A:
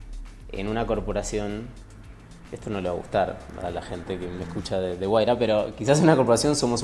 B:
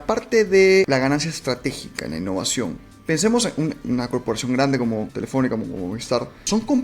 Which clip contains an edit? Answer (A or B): B